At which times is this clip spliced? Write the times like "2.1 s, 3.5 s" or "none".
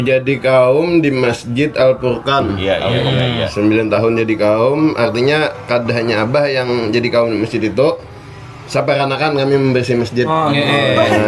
2.5 s